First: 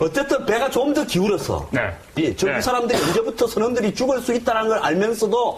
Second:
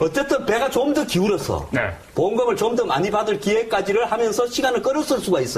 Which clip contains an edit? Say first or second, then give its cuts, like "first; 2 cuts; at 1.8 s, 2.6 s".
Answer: second; 1 cut; at 2.1 s